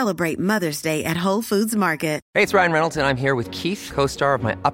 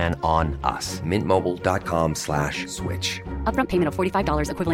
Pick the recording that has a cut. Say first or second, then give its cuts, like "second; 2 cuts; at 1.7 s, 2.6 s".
first; 1 cut; at 2.2 s